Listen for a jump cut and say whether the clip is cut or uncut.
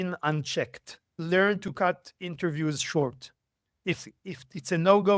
cut